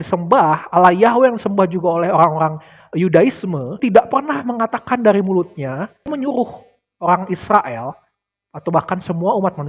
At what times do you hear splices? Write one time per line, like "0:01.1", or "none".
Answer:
0:03.7
0:06.1